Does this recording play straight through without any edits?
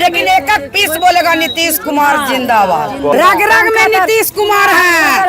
no; 1 cut; at 3.1 s

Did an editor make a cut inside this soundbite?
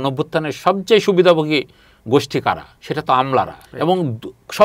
yes; 2 cuts; at 2.7 s, 3.6 s

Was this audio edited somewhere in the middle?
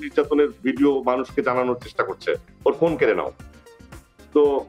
no; 0 cuts

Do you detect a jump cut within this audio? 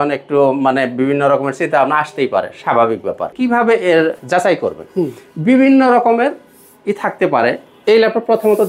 yes; 2 cuts; at 3.3 s, 4.2 s

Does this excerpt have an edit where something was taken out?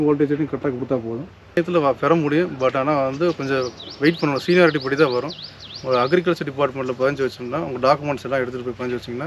yes; 1 cut; at 1.6 s

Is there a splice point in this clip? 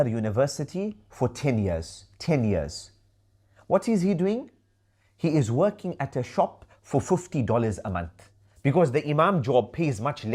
no; 0 cuts

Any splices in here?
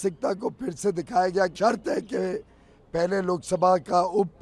yes; 1 cut; at 1.5 s

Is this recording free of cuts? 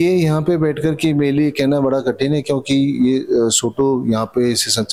yes; 0 cuts

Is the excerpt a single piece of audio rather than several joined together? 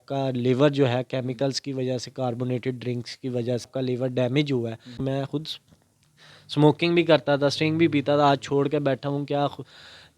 no; 2 cuts; at 3.7 s, 4.9 s

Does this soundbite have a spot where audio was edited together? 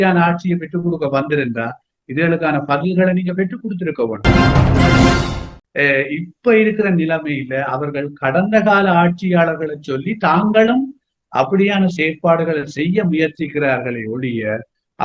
yes; 2 cuts; at 4.2 s, 5.5 s

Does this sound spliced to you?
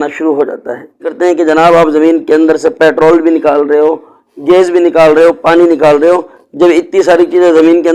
yes; 1 cut; at 1.1 s

